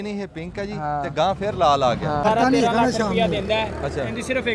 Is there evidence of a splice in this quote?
yes; 1 cut; at 2.2 s

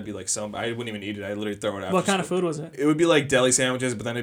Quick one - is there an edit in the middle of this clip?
no; 0 cuts

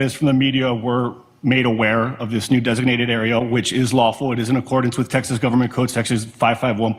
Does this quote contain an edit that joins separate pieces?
no; 0 cuts

